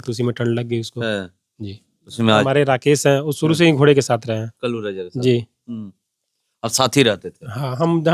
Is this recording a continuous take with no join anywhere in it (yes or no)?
no